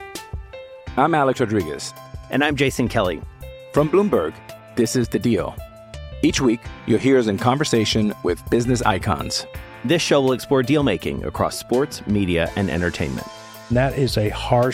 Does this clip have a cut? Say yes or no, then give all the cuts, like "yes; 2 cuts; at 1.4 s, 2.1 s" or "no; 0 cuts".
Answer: no; 0 cuts